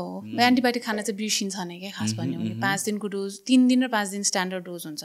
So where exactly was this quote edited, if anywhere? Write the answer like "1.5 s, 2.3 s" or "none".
none